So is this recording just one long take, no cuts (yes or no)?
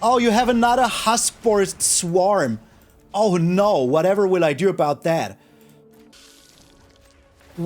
no